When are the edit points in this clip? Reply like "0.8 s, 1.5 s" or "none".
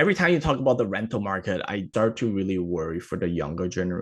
1.8 s